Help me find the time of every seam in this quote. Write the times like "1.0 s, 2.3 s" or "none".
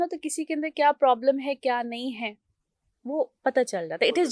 none